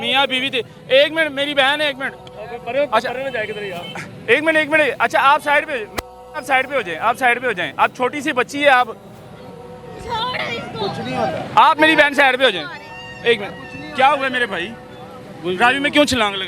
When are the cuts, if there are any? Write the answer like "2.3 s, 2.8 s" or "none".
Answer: none